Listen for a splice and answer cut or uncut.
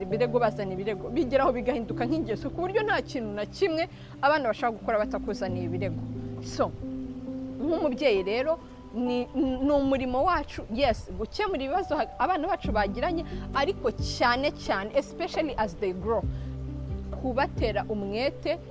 uncut